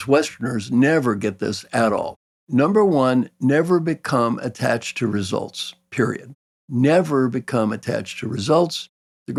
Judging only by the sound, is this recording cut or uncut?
uncut